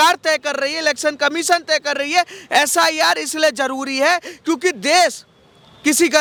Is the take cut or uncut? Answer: uncut